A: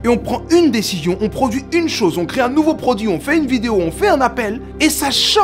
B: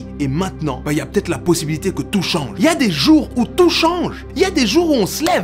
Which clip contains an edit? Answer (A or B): B